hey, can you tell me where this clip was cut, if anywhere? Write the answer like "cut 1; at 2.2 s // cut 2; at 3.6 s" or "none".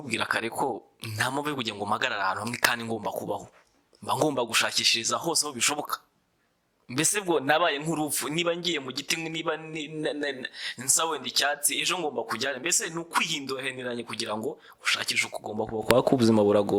none